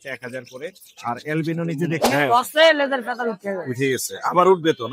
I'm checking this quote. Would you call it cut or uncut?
cut